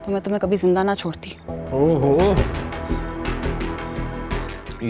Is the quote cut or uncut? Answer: uncut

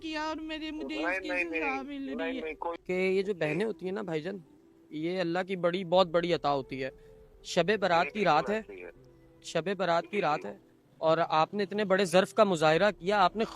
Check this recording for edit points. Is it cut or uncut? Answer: cut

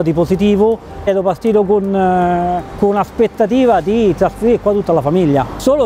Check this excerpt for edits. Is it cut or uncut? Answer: cut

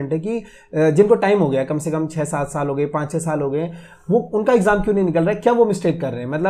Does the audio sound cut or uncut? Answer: uncut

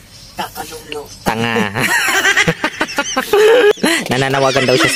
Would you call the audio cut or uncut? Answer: cut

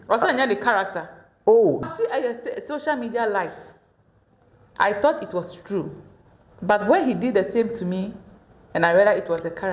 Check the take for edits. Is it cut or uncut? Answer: cut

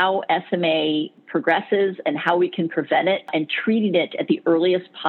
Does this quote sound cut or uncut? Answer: cut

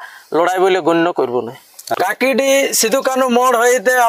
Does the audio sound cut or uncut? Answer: cut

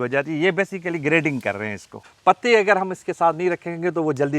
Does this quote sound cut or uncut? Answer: cut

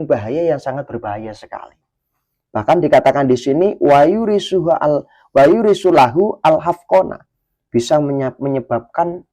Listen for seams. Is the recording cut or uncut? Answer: uncut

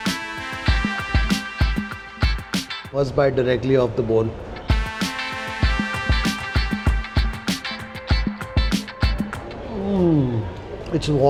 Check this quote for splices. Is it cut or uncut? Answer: uncut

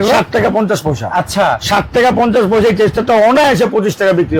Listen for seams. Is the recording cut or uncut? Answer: uncut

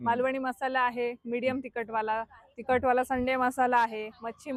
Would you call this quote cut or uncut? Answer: uncut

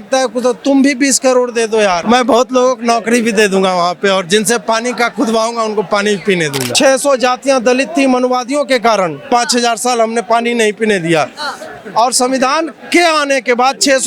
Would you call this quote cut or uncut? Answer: cut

